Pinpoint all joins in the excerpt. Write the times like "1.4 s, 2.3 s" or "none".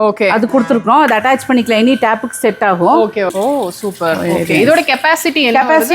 3.3 s